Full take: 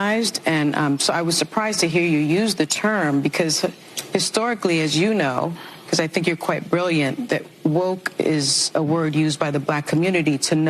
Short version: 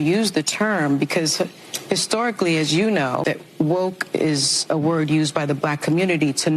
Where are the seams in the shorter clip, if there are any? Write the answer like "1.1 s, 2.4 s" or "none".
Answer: 3.2 s